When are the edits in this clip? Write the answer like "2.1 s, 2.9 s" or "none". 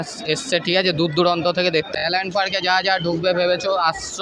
1.9 s